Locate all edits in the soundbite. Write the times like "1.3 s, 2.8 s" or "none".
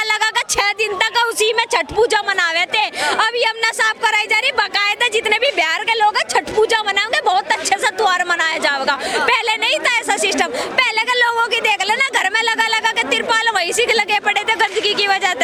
none